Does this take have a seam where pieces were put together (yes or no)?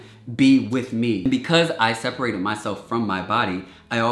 yes